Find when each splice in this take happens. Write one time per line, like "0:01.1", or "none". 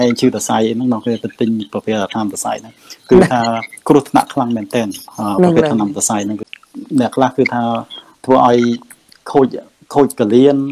0:06.4